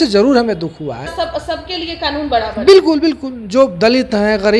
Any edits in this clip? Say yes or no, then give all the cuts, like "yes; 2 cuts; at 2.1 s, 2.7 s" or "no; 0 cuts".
yes; 1 cut; at 1.1 s